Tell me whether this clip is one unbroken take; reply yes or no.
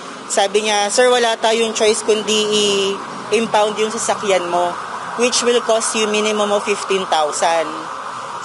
yes